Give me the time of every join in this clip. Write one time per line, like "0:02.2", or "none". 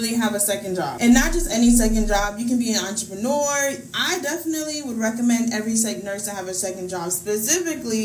none